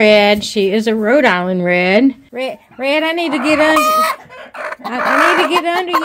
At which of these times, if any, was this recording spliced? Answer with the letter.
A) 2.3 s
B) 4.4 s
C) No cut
A